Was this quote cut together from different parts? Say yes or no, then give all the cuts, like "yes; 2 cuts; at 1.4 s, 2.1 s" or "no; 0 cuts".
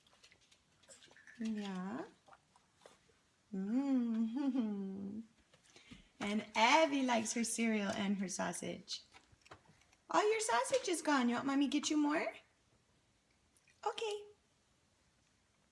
yes; 1 cut; at 7.2 s